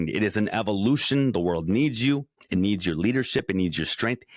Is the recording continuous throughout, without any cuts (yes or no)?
no